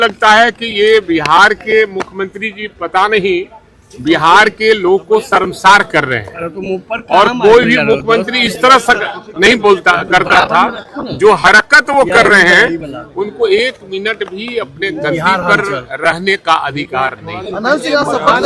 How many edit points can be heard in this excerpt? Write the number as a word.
zero